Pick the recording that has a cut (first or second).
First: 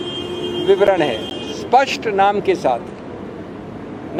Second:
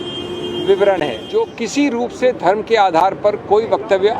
second